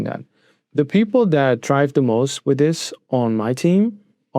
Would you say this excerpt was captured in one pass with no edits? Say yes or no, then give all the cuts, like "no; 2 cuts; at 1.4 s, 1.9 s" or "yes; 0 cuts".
yes; 0 cuts